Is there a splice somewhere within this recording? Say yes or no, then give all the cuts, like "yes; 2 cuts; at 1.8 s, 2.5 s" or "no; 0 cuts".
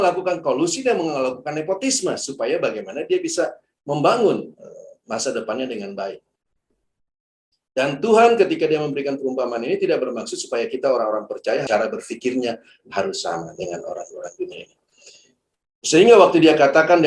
no; 0 cuts